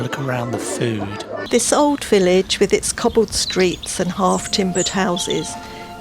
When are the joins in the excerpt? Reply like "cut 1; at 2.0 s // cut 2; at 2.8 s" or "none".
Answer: cut 1; at 1.4 s